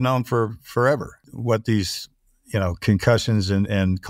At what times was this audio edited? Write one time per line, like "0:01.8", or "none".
0:01.3